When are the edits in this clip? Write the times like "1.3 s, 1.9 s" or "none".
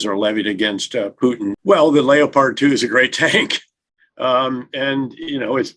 1.6 s